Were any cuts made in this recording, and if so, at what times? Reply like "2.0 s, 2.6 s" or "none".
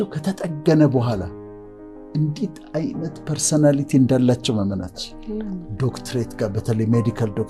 5.7 s